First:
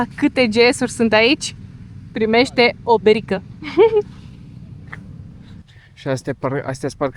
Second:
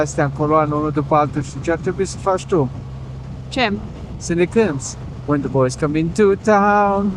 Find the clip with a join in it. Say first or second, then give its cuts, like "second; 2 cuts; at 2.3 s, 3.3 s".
first; 1 cut; at 5.6 s